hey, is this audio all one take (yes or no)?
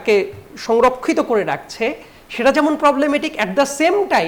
yes